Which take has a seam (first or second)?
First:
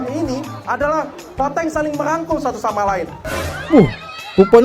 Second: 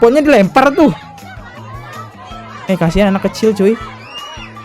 first